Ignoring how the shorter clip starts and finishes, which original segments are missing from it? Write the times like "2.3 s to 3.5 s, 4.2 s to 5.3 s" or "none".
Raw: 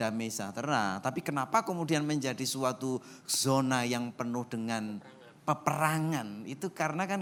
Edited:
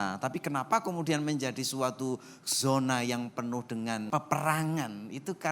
4.9 s to 5.4 s